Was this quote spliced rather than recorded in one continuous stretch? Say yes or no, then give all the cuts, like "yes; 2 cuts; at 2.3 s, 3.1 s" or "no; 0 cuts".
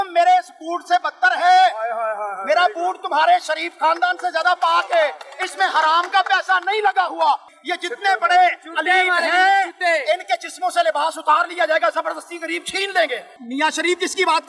yes; 2 cuts; at 7.5 s, 13.3 s